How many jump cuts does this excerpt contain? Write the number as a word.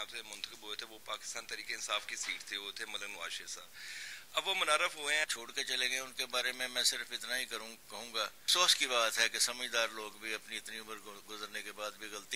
two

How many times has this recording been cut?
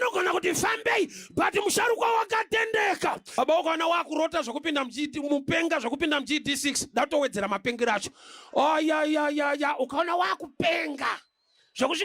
one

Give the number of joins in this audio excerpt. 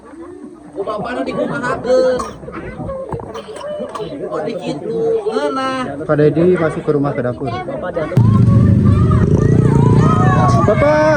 one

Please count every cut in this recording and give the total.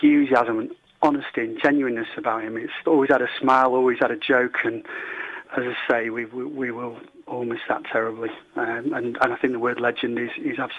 two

